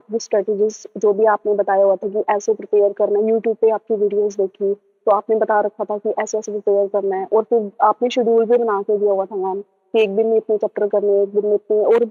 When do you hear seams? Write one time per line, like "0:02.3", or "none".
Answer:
none